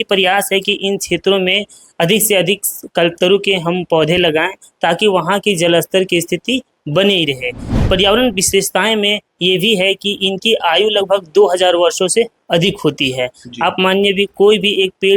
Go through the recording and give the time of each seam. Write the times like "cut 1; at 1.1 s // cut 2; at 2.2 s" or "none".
cut 1; at 7.7 s